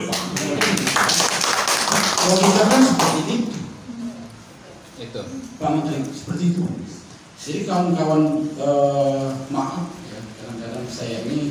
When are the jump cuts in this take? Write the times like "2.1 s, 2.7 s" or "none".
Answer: none